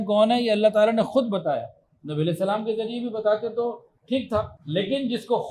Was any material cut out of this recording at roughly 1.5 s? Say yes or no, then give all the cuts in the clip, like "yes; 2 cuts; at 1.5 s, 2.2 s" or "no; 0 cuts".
no; 1 cut; at 4.6 s